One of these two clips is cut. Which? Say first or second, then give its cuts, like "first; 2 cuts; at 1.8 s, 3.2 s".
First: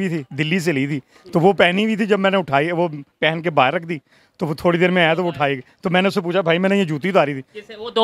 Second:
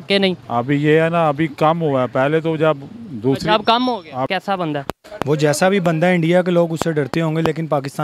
second; 1 cut; at 4.3 s